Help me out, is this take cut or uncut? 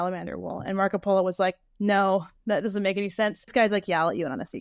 cut